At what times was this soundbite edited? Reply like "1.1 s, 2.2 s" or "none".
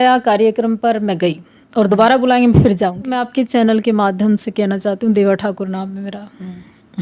3.2 s

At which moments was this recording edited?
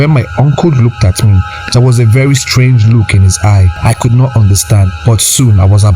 3.7 s, 4.9 s

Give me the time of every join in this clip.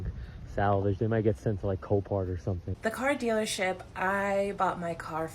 2.7 s

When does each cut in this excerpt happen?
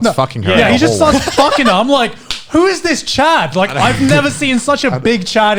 none

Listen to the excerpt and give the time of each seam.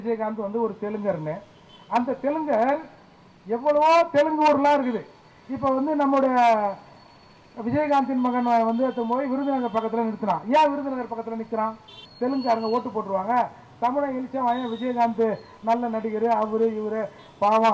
12.0 s

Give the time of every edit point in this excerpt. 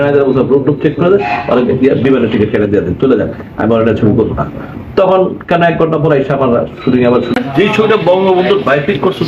7.3 s

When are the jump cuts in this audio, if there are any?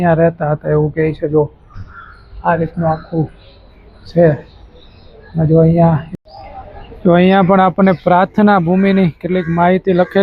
6.2 s

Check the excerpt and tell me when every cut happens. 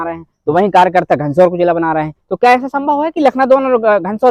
none

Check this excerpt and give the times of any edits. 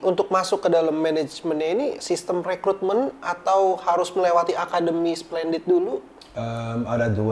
none

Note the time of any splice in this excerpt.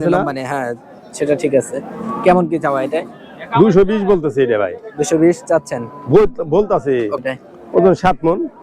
7.2 s

